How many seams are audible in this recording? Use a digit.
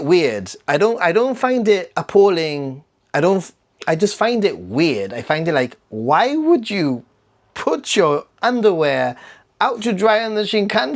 0